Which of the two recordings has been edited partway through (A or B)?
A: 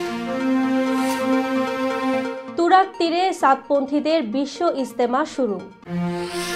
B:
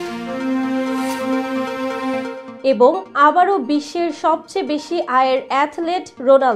B